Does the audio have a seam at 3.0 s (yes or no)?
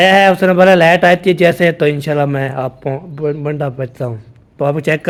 no